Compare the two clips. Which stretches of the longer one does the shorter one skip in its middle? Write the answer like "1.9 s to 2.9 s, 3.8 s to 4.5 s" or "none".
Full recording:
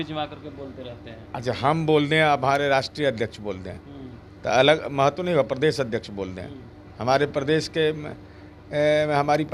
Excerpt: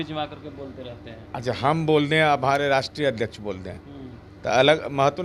none